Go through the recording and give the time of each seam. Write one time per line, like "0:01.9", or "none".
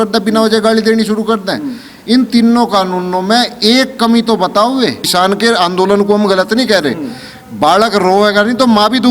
0:05.0